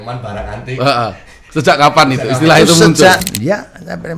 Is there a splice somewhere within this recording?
yes; 1 cut; at 3.2 s

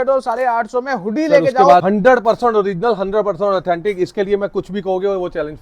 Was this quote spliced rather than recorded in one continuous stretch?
yes; 1 cut; at 1.8 s

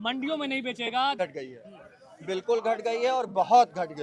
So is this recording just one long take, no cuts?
no; 1 cut; at 1.2 s

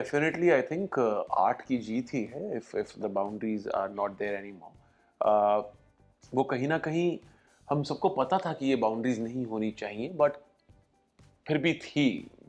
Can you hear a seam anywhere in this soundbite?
no; 0 cuts

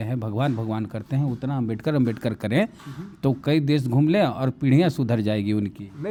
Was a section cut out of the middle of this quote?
no; 0 cuts

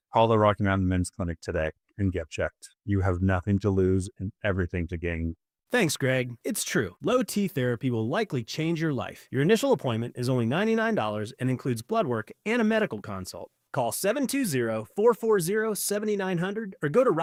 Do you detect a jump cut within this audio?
no; 0 cuts

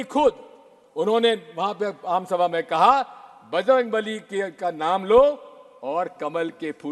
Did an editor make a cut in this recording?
no; 0 cuts

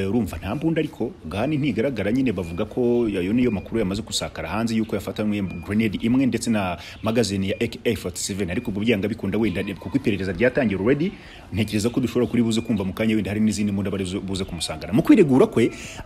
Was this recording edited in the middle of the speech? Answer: no; 0 cuts

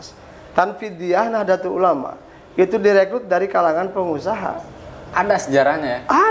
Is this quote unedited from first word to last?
yes; 0 cuts

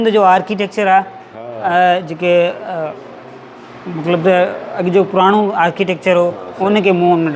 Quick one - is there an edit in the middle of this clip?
no; 0 cuts

